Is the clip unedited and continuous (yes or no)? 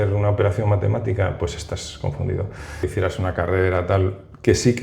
no